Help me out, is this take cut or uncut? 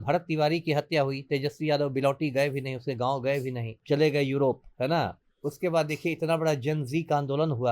cut